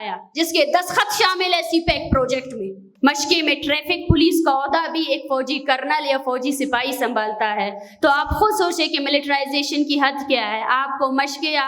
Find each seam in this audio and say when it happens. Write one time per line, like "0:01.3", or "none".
0:02.8